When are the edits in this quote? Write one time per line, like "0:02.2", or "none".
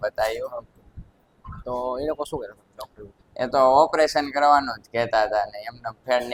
none

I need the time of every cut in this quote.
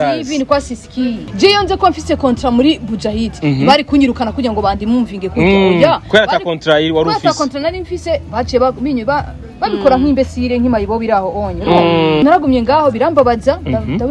0:01.2
0:12.2

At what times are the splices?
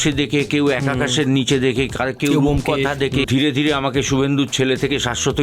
0:03.3

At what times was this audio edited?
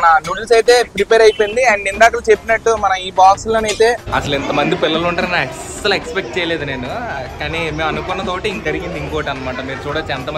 0:04.0
0:08.6

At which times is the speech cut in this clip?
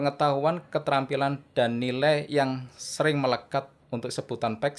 0:03.8

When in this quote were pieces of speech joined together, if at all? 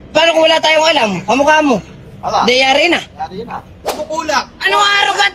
0:03.8

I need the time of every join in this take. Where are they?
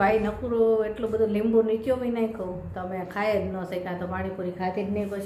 none

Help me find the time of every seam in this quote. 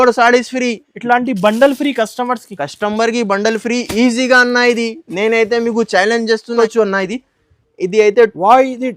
0:06.5

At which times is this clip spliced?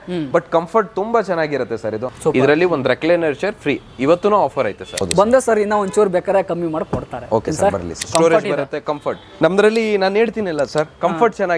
0:02.1
0:05.0
0:08.1
0:09.2

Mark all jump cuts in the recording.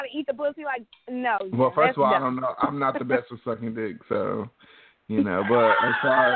none

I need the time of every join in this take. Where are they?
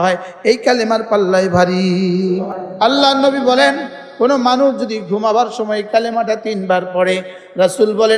0:02.5

